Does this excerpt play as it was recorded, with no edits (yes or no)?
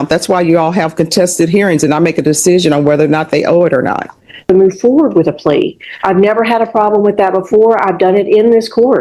no